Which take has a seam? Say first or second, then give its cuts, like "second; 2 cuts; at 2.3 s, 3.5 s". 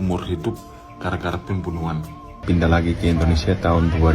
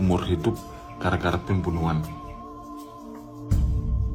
first; 1 cut; at 2.4 s